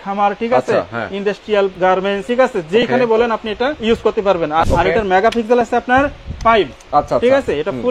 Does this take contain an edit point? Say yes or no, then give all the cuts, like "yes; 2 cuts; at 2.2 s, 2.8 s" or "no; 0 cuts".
yes; 3 cuts; at 2.0 s, 3.8 s, 4.6 s